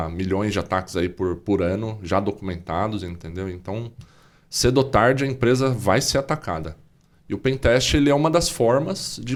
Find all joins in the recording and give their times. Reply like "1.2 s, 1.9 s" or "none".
none

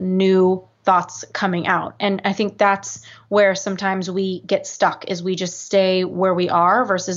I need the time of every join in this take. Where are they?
none

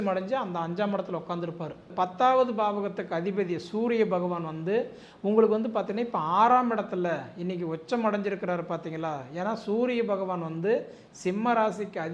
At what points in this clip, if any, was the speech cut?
1.9 s

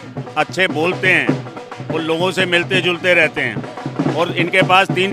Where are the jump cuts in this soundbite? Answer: none

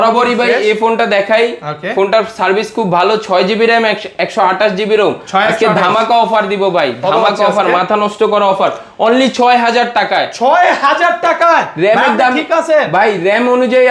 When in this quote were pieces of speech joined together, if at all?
none

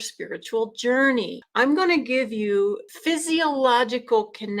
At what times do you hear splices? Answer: 1.4 s, 2.9 s

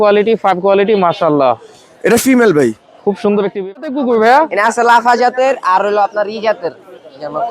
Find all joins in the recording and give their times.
3.8 s

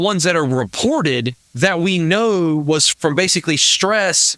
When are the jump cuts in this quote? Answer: 1.4 s, 2.9 s

